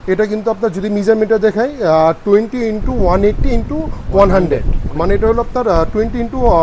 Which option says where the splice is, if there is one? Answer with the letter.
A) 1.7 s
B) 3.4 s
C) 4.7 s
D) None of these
D